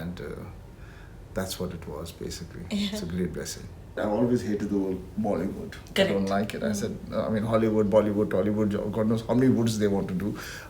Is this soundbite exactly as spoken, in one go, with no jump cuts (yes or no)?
no